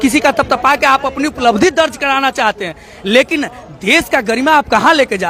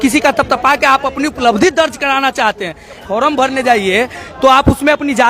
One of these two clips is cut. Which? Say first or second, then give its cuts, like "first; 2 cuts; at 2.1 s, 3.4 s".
second; 1 cut; at 3.0 s